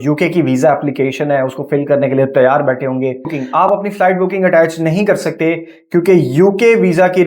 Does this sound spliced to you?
yes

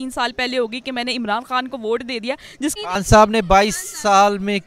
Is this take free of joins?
no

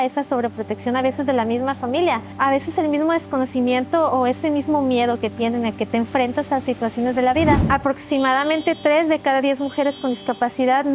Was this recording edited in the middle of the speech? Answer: yes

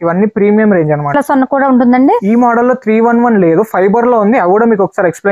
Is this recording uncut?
yes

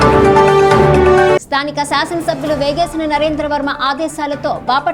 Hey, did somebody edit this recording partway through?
yes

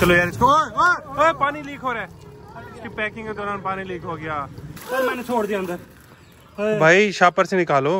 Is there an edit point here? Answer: yes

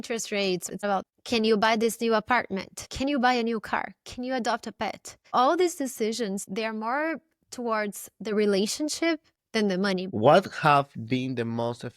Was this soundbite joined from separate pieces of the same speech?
yes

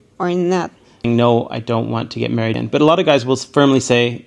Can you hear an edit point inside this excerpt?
yes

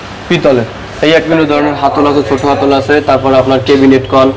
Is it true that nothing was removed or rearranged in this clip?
no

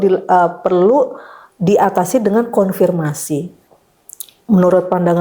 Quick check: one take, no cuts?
no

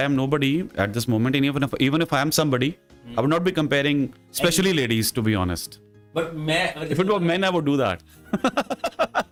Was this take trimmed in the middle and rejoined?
no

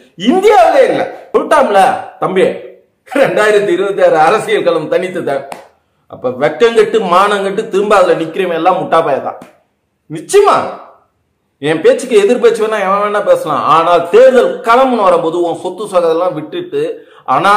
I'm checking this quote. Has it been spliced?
yes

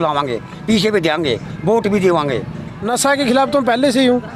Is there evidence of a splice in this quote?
yes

